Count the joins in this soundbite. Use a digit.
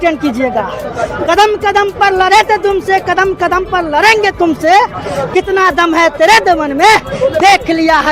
0